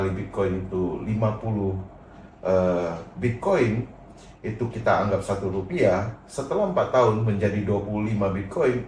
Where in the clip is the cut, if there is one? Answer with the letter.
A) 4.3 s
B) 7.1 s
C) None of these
C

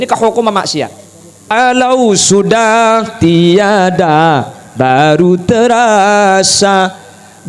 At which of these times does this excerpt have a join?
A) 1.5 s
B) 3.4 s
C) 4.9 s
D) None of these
A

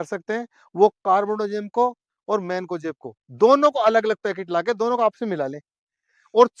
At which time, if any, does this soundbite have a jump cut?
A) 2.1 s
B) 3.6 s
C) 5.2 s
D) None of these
D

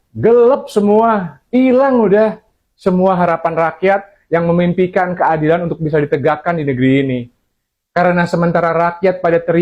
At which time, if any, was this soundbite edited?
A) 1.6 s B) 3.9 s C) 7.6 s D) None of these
D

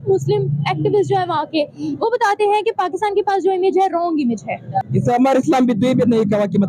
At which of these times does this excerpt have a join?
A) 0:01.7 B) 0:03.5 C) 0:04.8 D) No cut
C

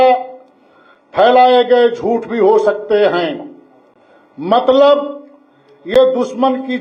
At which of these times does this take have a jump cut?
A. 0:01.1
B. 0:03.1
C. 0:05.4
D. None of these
D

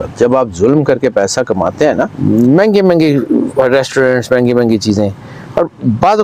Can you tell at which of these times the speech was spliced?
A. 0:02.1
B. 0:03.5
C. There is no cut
A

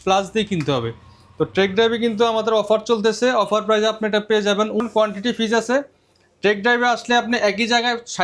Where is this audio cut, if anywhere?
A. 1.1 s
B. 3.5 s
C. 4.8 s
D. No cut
C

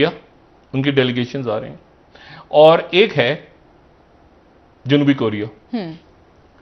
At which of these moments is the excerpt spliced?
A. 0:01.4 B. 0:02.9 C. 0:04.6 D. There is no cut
D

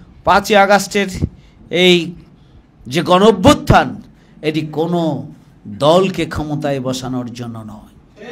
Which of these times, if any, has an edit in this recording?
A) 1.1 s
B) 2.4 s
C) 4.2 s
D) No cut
D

